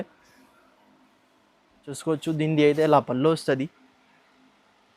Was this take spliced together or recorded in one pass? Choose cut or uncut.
cut